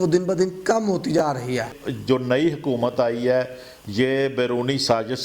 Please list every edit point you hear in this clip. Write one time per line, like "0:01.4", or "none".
0:01.8